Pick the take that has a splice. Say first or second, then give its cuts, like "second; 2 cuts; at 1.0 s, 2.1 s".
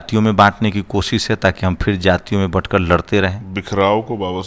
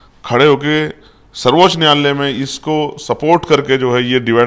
first; 1 cut; at 3.5 s